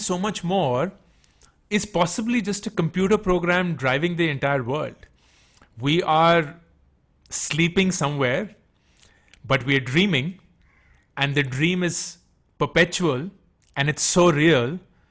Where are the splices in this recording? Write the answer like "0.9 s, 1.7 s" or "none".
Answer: none